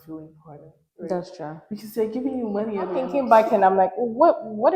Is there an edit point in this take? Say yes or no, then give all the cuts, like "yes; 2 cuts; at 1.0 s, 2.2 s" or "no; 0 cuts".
yes; 1 cut; at 3.1 s